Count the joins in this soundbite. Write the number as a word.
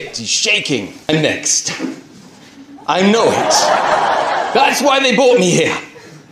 one